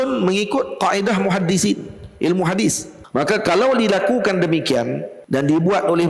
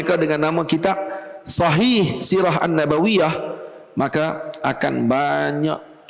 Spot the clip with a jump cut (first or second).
first